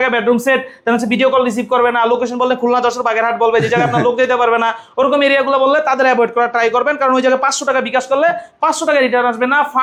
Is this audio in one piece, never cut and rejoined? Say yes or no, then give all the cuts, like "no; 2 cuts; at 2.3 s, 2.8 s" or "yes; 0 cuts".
yes; 0 cuts